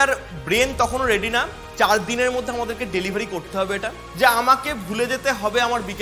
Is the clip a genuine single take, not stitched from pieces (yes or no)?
no